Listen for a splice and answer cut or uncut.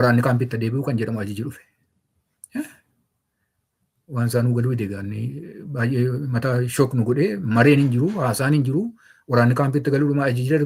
uncut